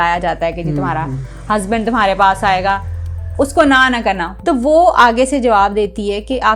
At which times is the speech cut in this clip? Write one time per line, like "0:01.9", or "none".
0:04.3